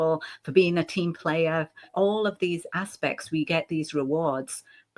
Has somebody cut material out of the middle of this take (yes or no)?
yes